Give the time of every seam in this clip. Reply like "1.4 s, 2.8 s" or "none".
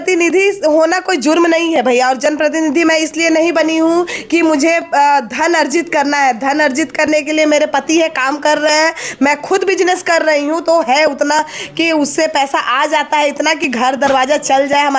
none